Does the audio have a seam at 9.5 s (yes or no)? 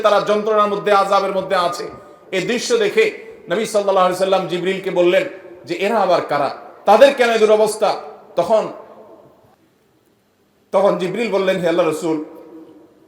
yes